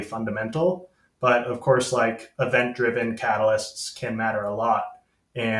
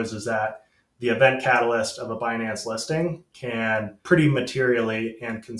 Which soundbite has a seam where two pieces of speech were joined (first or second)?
second